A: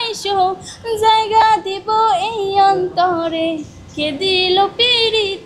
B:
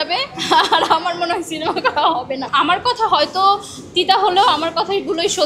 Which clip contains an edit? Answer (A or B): B